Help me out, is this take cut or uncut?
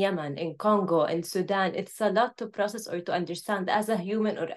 uncut